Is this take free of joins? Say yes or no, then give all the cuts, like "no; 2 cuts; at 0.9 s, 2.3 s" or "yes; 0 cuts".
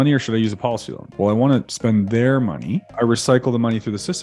no; 3 cuts; at 1.1 s, 1.7 s, 2.9 s